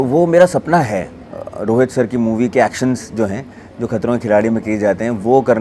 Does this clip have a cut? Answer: no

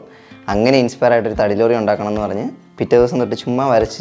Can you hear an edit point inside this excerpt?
no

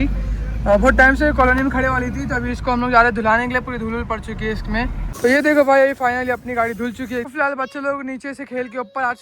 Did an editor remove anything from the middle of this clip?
yes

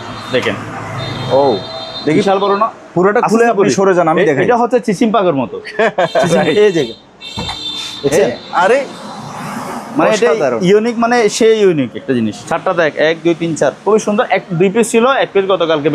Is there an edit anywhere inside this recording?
yes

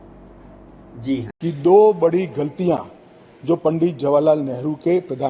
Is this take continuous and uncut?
no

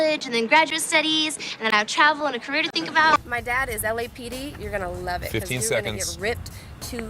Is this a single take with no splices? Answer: no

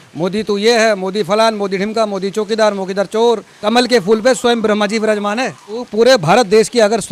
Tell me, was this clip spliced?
yes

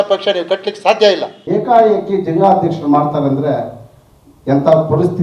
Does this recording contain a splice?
yes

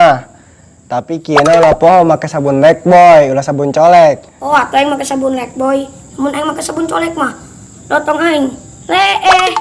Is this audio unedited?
no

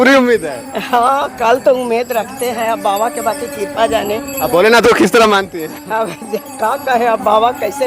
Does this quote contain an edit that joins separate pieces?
no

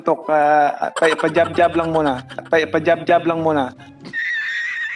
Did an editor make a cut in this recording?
no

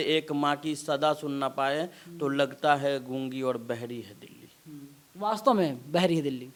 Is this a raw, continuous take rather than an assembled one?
yes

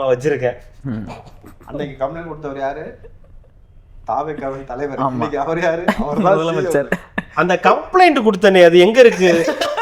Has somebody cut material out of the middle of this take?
no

